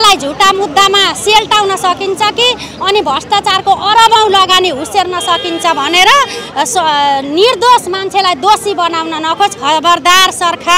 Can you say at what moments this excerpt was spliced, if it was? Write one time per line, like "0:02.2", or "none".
none